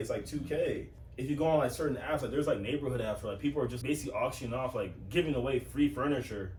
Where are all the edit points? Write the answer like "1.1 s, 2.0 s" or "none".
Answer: none